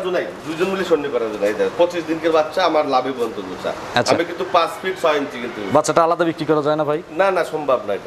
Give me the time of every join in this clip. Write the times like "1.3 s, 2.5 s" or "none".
none